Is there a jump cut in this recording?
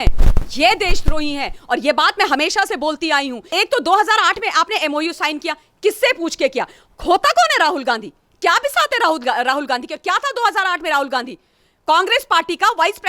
yes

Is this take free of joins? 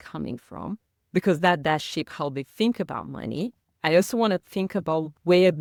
yes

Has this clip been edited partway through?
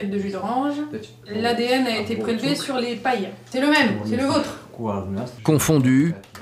yes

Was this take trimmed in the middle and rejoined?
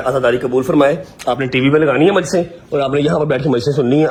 no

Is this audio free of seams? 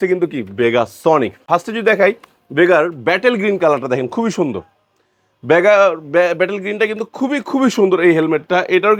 yes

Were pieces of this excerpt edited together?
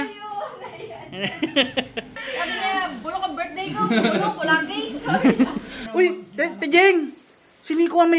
yes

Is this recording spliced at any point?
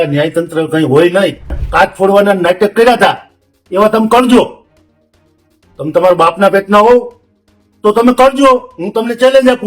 yes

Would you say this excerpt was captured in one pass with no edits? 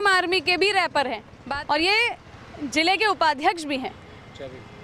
no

